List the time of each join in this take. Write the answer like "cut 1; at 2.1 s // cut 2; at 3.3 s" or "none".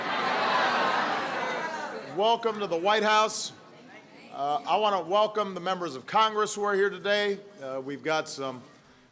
cut 1; at 7.2 s